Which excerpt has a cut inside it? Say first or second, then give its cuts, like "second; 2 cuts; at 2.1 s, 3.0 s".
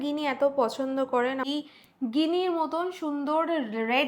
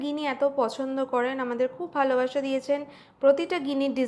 first; 1 cut; at 1.4 s